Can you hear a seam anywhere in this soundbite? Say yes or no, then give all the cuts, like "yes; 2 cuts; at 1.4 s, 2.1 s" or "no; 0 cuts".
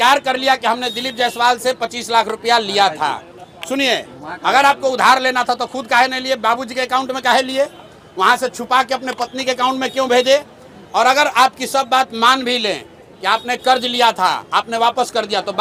no; 0 cuts